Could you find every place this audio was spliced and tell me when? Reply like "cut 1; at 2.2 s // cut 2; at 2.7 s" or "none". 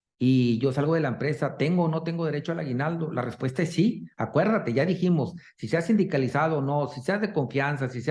none